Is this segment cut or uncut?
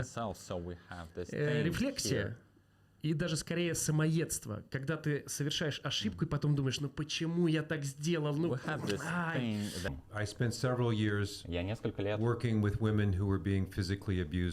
cut